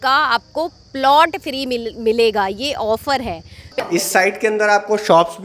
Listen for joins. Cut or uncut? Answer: cut